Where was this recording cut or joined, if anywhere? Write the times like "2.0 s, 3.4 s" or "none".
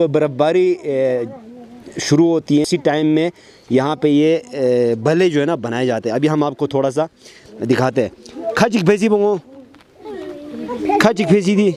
none